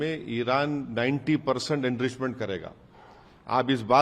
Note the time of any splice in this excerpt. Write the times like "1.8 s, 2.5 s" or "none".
none